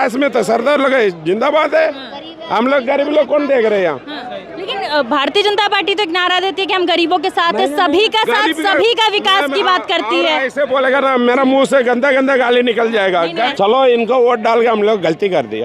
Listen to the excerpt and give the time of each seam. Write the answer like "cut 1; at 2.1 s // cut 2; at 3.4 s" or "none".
cut 1; at 13.5 s